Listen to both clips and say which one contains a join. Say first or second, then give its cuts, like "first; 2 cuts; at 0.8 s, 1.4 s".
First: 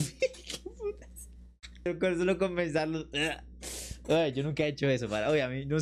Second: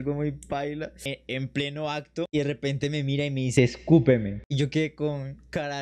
second; 3 cuts; at 0.9 s, 2.3 s, 4.4 s